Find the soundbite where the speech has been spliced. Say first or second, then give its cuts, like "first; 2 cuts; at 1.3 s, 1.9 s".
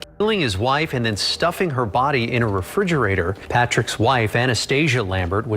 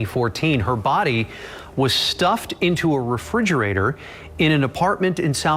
first; 1 cut; at 3.4 s